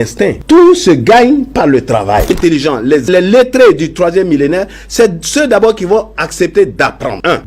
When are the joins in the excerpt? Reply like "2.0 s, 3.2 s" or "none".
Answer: 2.3 s